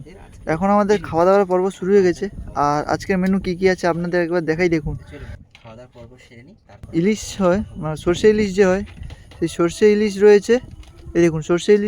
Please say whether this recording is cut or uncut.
cut